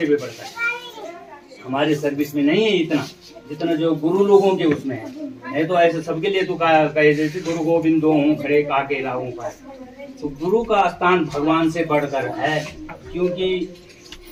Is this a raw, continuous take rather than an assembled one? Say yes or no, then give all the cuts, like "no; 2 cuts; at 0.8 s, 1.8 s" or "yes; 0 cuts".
yes; 0 cuts